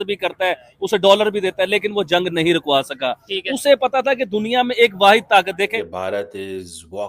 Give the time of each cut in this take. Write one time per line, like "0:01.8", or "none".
0:06.0